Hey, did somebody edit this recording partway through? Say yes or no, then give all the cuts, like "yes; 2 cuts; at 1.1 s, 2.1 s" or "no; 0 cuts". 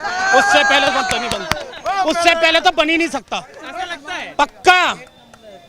no; 0 cuts